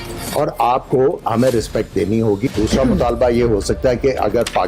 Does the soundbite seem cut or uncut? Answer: cut